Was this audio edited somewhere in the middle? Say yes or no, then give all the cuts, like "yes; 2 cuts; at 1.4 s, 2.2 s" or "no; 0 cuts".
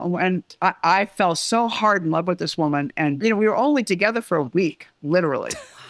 no; 0 cuts